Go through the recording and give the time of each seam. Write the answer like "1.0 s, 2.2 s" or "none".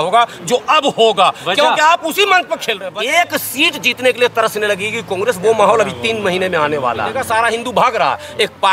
2.9 s, 7.2 s